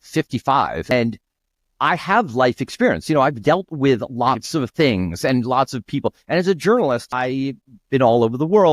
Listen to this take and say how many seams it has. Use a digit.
2